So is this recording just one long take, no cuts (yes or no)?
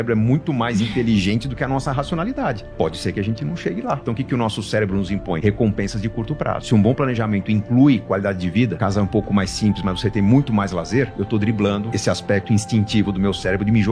no